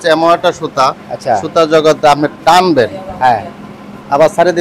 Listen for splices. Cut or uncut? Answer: uncut